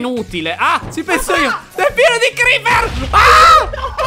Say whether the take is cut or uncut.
cut